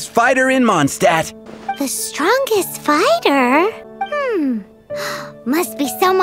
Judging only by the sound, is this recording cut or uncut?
cut